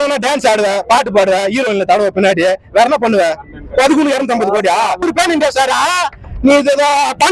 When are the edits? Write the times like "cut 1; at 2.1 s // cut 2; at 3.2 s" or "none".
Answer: cut 1; at 5.0 s